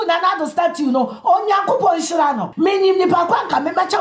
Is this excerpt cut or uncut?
cut